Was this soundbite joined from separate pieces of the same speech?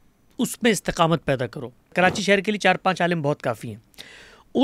yes; 1 cut; at 1.9 s

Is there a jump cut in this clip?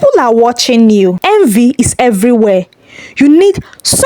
yes; 1 cut; at 1.2 s

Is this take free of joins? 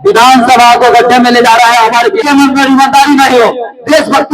no; 1 cut; at 2.2 s

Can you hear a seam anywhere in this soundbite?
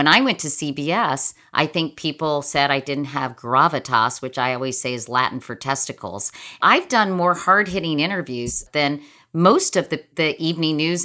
yes; 3 cuts; at 6.6 s, 8.6 s, 10.1 s

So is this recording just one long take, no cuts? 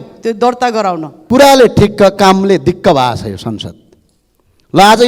no; 1 cut; at 1.1 s

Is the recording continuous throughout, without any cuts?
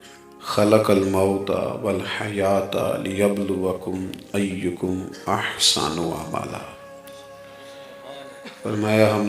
yes; 0 cuts

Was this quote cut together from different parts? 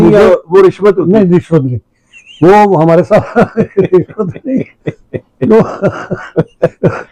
no; 0 cuts

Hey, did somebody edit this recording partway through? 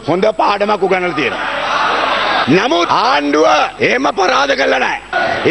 no; 0 cuts

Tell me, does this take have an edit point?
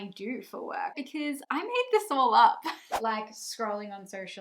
yes; 2 cuts; at 1.0 s, 3.0 s

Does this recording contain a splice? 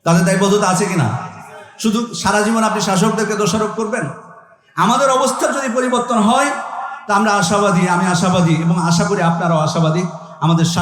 no; 0 cuts

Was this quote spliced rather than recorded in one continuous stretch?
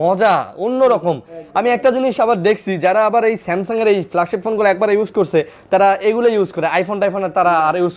no; 0 cuts

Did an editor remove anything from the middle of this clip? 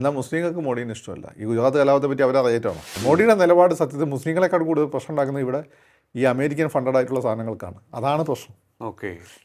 yes; 1 cut; at 2.9 s

